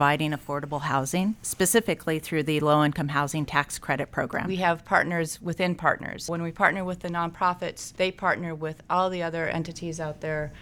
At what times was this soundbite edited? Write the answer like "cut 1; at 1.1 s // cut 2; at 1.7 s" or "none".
cut 1; at 1.5 s // cut 2; at 4.5 s // cut 3; at 6.3 s // cut 4; at 7.8 s